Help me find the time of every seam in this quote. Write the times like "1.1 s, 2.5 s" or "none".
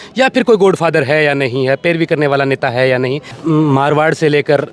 3.4 s